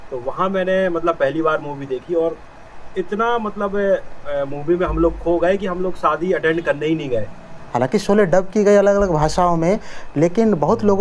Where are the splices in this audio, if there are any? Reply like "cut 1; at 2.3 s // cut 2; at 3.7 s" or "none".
cut 1; at 7.6 s